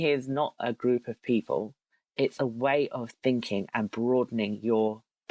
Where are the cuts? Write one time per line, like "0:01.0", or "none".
none